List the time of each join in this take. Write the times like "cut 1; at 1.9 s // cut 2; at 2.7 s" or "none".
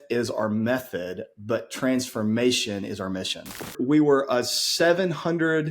cut 1; at 3.7 s